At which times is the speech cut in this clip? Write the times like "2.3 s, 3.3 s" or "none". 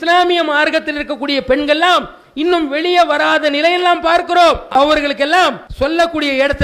4.7 s, 5.6 s